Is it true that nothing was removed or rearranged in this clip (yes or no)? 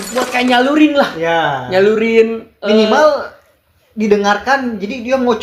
yes